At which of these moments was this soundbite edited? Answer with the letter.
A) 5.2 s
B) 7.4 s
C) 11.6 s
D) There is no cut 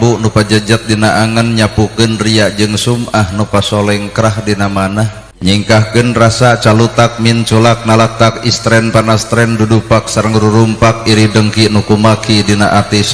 A